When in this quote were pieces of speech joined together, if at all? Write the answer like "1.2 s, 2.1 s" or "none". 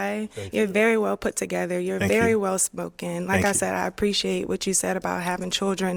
none